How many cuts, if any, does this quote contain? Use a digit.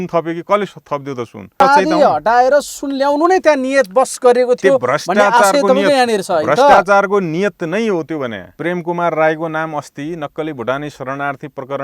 2